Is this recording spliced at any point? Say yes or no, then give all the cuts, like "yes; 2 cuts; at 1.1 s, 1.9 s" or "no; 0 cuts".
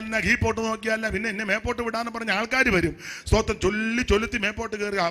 no; 0 cuts